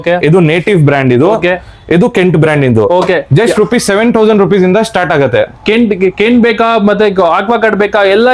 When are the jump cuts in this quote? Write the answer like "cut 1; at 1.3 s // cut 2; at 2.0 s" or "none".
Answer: none

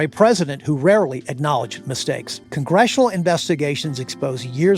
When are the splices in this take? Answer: cut 1; at 2.4 s

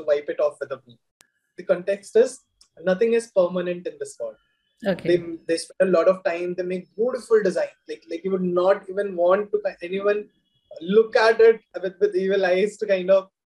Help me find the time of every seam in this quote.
cut 1; at 11.8 s

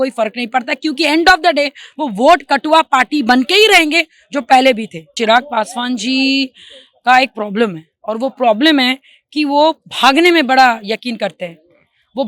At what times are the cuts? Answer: cut 1; at 5.1 s

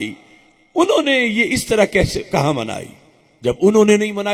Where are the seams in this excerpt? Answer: none

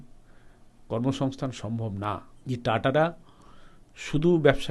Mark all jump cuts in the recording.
cut 1; at 2.3 s

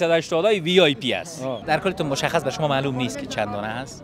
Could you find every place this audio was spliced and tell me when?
cut 1; at 1.6 s

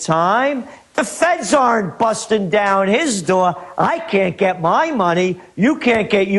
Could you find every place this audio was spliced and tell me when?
cut 1; at 3.4 s

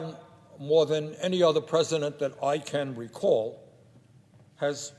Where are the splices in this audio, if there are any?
none

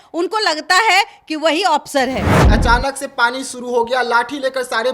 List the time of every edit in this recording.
cut 1; at 2.3 s

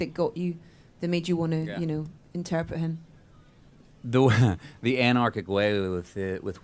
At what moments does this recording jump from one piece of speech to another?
cut 1; at 2.4 s

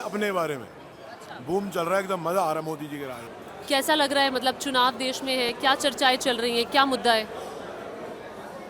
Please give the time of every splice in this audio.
none

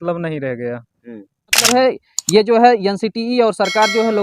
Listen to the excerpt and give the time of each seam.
cut 1; at 1.7 s

